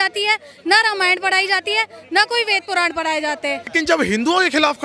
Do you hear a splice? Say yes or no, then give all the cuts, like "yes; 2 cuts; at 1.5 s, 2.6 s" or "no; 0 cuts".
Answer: yes; 1 cut; at 3.8 s